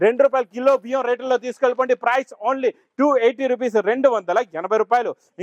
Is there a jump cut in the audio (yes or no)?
no